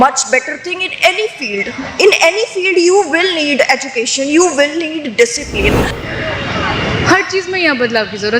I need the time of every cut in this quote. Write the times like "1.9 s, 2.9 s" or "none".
5.9 s